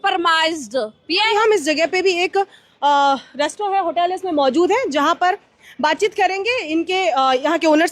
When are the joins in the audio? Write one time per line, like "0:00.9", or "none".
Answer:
0:01.3